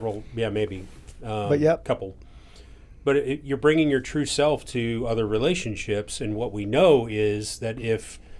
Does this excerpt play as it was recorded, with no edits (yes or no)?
yes